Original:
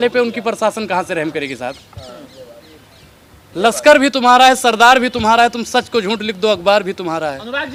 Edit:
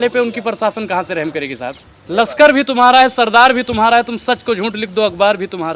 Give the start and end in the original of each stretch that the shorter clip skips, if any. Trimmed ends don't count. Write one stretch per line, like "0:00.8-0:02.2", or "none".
0:01.9-0:03.4